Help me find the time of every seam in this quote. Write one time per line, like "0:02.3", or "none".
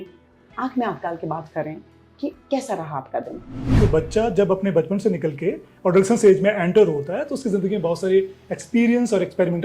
0:03.7